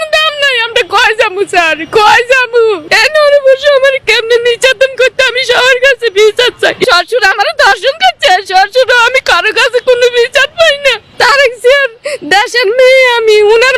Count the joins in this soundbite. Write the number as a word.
three